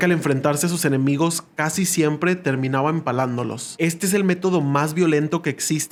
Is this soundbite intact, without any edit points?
yes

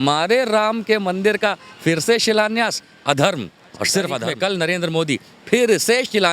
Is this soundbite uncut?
no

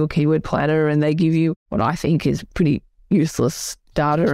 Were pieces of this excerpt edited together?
yes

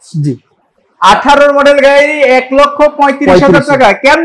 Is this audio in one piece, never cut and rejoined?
yes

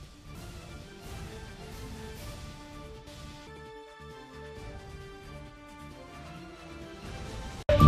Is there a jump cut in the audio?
no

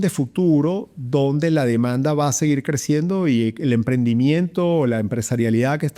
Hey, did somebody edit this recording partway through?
no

